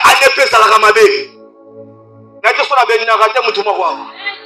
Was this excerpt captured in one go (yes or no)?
yes